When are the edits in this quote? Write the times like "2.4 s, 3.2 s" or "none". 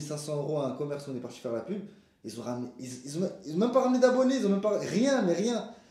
none